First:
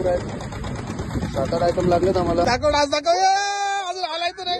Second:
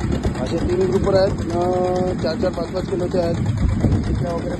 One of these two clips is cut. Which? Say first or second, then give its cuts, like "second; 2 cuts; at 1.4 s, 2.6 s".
first; 1 cut; at 2.4 s